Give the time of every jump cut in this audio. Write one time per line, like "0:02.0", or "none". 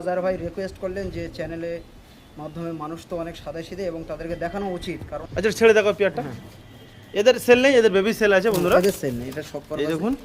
0:05.1